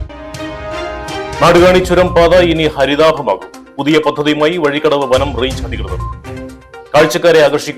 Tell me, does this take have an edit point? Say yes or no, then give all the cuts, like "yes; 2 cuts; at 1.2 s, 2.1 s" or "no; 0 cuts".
yes; 1 cut; at 1.4 s